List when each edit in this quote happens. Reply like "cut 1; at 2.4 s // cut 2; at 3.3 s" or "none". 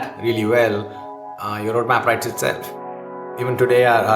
cut 1; at 2.8 s

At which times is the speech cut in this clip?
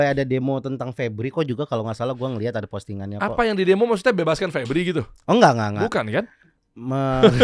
none

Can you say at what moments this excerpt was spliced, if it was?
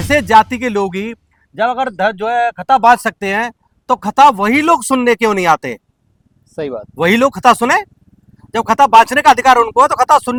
none

